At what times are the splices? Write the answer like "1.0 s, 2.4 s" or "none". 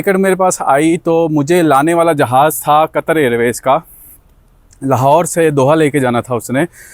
none